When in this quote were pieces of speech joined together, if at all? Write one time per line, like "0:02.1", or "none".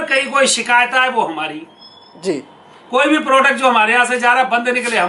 none